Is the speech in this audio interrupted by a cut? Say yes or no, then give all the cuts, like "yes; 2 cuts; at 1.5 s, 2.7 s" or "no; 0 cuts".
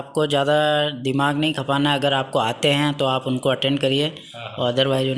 no; 0 cuts